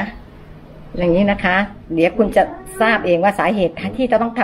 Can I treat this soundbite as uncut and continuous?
yes; 0 cuts

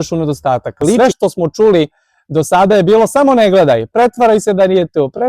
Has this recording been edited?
yes; 1 cut; at 1.0 s

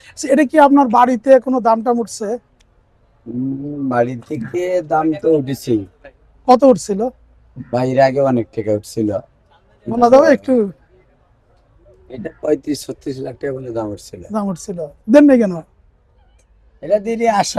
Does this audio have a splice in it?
no; 0 cuts

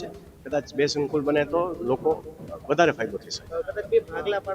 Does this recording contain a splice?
no; 0 cuts

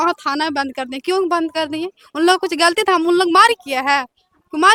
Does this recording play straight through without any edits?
yes; 0 cuts

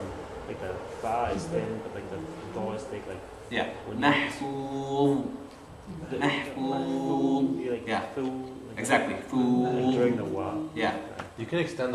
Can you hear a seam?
yes; 1 cut; at 2.8 s

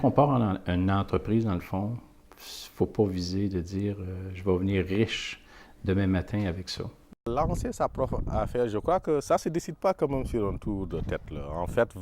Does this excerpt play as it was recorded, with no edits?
no; 1 cut; at 7.3 s

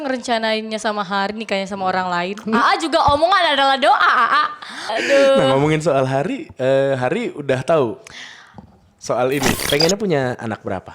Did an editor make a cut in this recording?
yes; 2 cuts; at 5.0 s, 9.6 s

